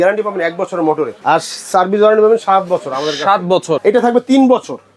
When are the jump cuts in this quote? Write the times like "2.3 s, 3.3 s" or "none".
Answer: 1.1 s, 3.8 s